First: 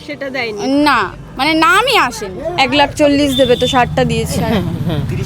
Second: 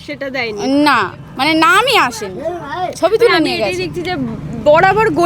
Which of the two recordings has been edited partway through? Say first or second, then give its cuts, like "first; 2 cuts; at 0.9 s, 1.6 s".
first; 1 cut; at 2.4 s